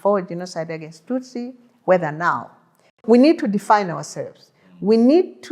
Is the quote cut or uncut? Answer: cut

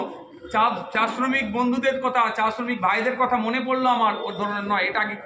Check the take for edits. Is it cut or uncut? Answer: uncut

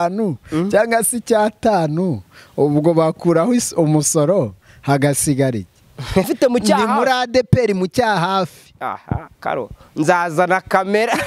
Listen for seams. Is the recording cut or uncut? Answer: cut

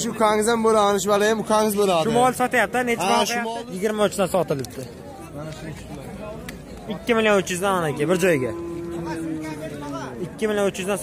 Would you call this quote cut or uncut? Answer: cut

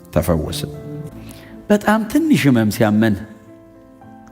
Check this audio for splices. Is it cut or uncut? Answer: cut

